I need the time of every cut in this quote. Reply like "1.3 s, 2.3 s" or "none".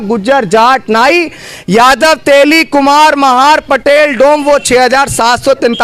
none